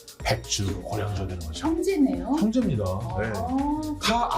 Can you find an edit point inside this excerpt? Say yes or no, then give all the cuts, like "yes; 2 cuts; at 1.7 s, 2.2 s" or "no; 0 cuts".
no; 0 cuts